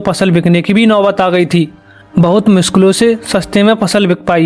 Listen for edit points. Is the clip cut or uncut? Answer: uncut